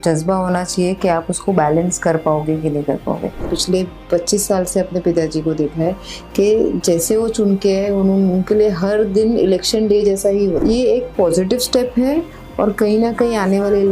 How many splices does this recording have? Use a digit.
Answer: 2